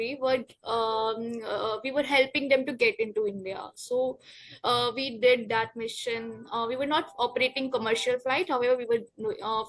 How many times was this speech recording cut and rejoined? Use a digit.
0